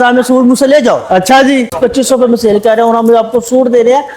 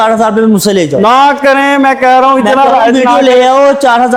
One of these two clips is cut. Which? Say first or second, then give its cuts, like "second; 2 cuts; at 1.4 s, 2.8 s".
first; 1 cut; at 1.7 s